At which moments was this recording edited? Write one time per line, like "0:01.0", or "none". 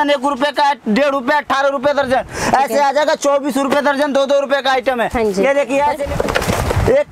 0:06.1